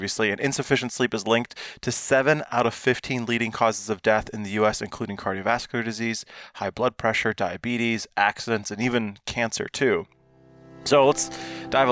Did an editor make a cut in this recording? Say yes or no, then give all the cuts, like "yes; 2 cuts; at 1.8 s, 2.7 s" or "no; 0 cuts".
no; 0 cuts